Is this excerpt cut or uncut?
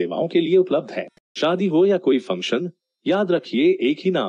cut